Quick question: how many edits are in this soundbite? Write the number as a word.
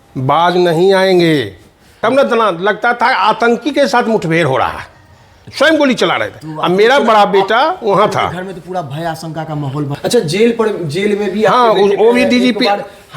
two